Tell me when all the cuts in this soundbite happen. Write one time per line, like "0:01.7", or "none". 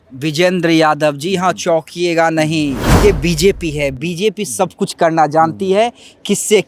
0:02.9